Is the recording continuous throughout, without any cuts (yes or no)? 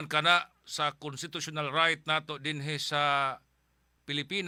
yes